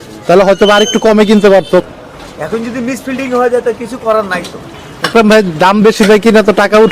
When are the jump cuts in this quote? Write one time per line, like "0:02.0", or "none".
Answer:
0:01.8
0:05.1